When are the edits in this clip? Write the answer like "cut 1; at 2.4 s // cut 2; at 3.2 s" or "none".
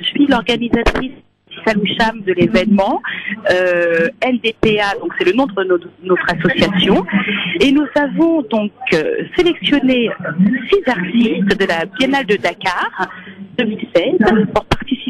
cut 1; at 4.8 s